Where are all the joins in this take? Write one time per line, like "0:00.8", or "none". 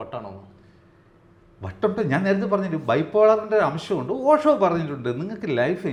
none